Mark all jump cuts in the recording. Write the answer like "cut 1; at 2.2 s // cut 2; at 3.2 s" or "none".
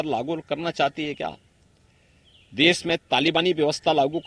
none